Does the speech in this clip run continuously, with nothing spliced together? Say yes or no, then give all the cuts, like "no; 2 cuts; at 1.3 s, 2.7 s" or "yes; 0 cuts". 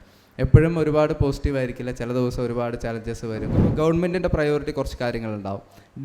no; 1 cut; at 3.6 s